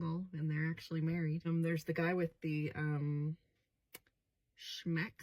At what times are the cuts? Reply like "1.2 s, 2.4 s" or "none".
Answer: 2.3 s